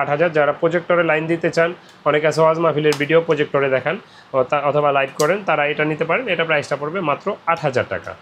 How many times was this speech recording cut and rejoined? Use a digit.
0